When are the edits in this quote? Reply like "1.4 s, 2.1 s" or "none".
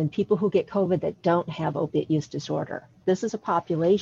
3.0 s